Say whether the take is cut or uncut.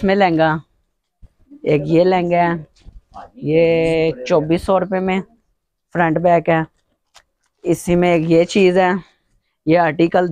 uncut